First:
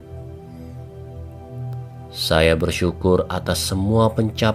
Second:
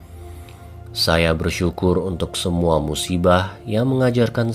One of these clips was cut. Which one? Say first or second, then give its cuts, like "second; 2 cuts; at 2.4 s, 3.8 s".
second; 1 cut; at 1.0 s